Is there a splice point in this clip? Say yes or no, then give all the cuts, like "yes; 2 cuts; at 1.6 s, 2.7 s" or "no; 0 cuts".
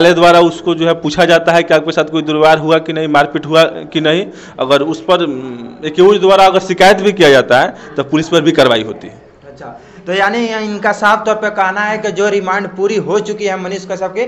no; 0 cuts